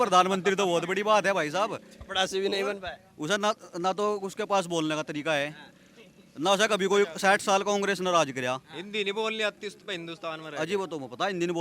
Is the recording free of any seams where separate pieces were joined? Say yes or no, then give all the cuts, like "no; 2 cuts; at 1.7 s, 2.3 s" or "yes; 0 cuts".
yes; 0 cuts